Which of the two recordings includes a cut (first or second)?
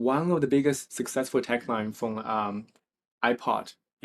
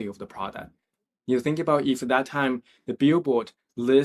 first